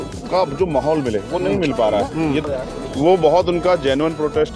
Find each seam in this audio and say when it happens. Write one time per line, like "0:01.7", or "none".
0:02.4